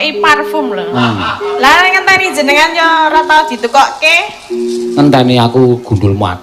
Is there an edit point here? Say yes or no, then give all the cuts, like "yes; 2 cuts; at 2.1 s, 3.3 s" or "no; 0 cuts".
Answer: yes; 1 cut; at 1.0 s